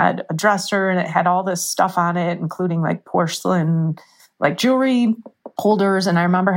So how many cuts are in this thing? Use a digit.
0